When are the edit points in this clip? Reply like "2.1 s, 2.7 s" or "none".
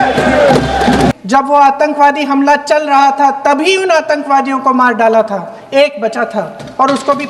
1.1 s